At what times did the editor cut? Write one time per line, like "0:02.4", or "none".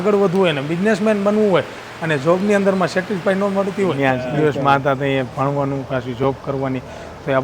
0:03.9